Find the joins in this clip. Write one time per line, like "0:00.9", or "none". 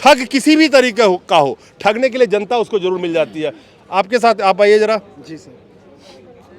none